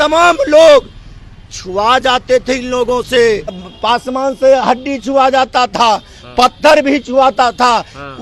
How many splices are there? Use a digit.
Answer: 1